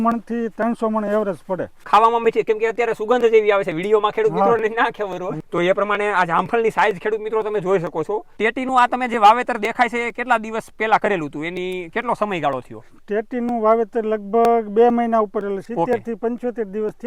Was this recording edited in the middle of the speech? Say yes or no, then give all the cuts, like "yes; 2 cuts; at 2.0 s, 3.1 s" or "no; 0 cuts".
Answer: yes; 4 cuts; at 1.8 s, 5.3 s, 8.4 s, 15.6 s